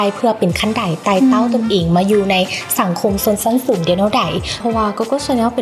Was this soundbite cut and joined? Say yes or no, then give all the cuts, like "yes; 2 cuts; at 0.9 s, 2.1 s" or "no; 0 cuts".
yes; 1 cut; at 4.6 s